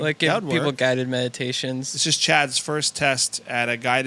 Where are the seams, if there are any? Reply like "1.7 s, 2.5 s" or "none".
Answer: 1.9 s